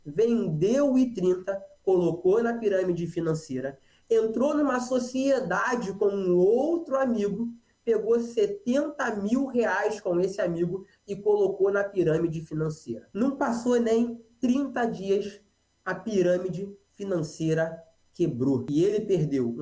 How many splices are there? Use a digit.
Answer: 1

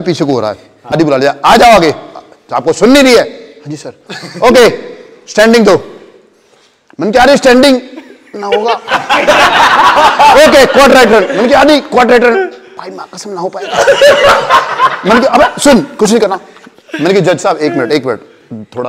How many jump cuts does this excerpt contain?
1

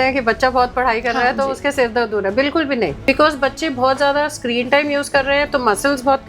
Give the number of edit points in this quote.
1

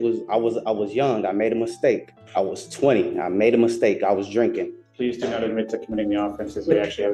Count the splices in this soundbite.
2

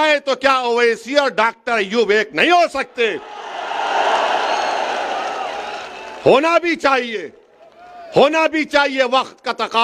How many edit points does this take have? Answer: 0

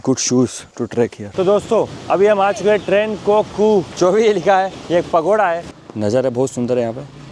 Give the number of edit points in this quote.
4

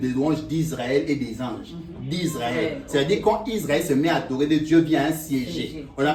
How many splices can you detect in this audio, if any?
0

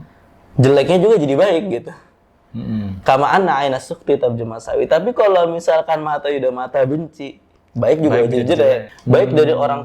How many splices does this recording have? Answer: 1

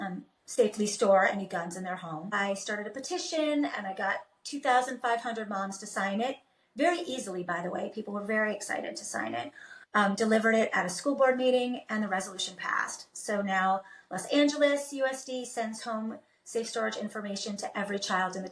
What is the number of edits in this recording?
1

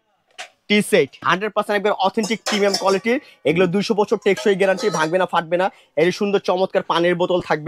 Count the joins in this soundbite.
1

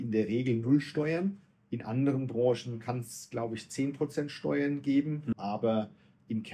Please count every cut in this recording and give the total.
0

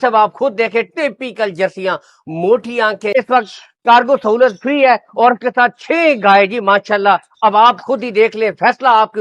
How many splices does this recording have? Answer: 1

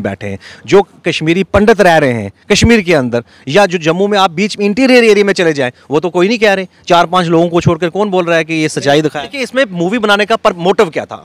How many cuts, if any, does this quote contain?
1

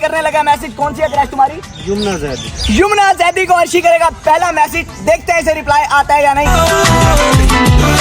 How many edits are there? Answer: 0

